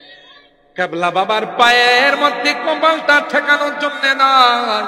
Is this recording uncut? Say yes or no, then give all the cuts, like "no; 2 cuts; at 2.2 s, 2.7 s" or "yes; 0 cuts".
yes; 0 cuts